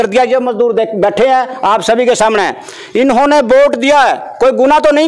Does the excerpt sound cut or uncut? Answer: uncut